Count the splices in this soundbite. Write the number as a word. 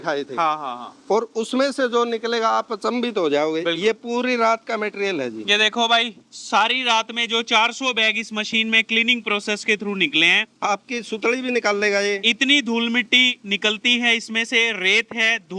zero